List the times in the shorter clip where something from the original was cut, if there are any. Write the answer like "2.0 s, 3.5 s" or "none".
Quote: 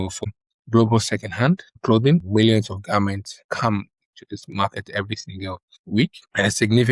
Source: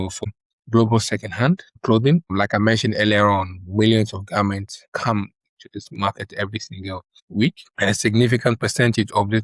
2.3 s